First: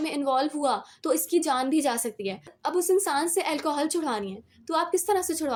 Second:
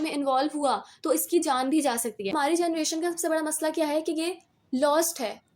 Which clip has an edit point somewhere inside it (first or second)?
second